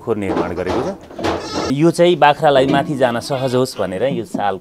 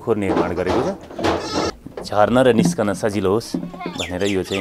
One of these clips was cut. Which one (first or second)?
second